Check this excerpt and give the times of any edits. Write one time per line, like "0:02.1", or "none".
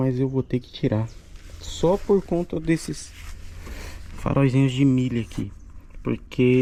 none